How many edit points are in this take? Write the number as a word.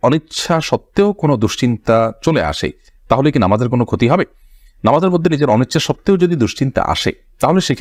zero